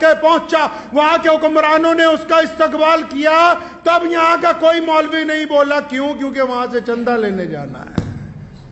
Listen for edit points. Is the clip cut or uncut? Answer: uncut